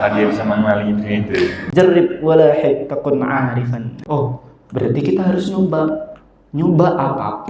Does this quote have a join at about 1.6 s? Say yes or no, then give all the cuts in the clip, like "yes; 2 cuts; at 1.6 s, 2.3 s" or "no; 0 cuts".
yes; 2 cuts; at 1.6 s, 4.0 s